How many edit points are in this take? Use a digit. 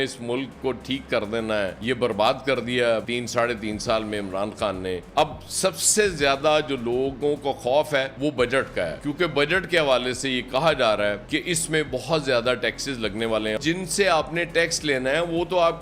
2